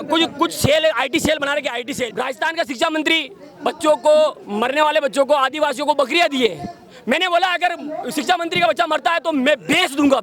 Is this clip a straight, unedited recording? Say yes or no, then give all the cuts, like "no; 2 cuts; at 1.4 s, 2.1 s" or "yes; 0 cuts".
no; 1 cut; at 2.0 s